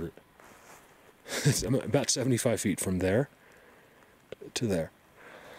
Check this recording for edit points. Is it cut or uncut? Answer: uncut